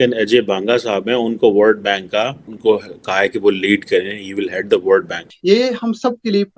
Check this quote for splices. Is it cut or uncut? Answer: cut